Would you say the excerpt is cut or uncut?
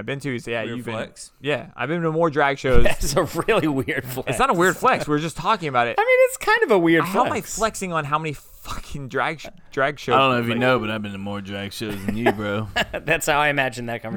uncut